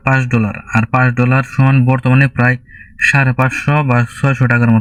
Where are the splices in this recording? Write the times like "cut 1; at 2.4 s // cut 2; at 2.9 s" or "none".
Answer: none